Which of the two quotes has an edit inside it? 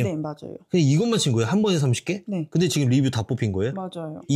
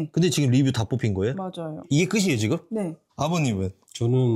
second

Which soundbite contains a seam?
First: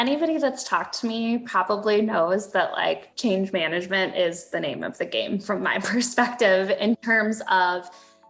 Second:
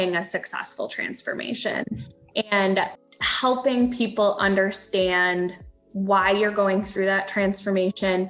second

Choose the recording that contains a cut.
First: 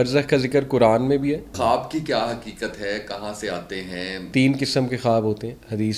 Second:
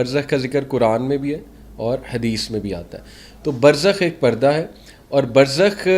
first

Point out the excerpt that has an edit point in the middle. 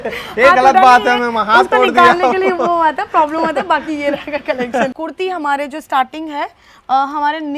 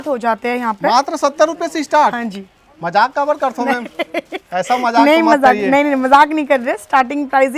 first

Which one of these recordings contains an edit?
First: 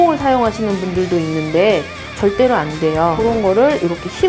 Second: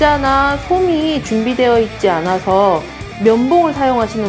first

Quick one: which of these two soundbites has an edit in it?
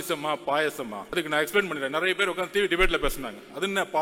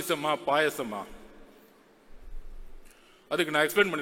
first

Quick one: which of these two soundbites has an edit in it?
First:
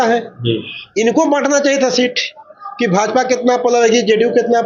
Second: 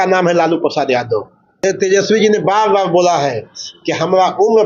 second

